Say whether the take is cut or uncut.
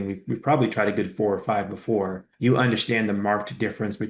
uncut